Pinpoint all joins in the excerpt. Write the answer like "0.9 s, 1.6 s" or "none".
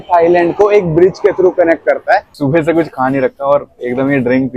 2.3 s